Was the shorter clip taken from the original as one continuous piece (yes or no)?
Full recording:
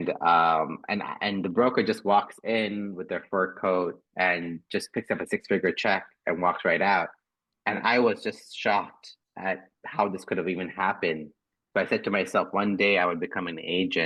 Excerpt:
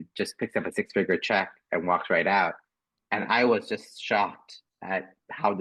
yes